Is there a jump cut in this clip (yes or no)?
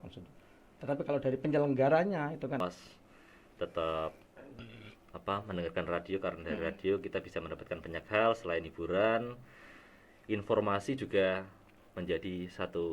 yes